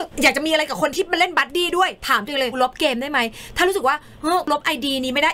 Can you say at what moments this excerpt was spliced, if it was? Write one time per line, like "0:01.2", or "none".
0:02.6
0:04.5